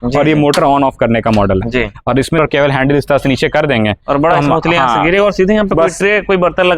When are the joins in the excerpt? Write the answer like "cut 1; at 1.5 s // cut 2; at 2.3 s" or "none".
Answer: cut 1; at 2.4 s